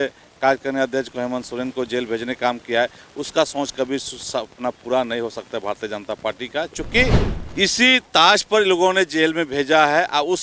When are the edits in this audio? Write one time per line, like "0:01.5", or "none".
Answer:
0:07.3